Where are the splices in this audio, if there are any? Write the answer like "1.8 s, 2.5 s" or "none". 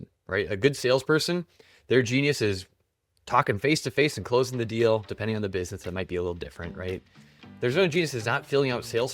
none